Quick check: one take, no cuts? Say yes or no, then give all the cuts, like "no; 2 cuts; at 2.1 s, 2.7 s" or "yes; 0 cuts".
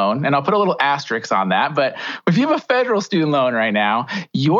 yes; 0 cuts